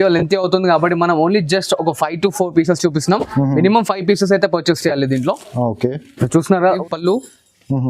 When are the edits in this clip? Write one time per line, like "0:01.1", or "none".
0:06.8